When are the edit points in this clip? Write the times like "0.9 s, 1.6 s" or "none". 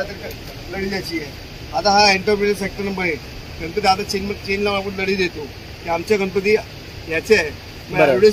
none